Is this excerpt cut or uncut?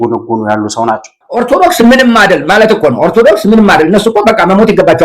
cut